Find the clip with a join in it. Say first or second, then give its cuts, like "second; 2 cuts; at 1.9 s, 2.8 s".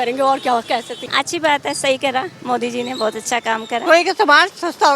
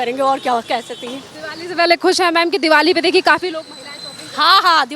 first; 2 cuts; at 1.0 s, 3.8 s